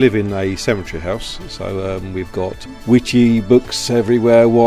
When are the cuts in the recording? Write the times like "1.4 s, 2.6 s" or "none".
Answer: 2.6 s